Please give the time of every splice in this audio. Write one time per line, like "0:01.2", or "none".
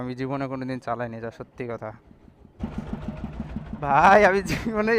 0:02.6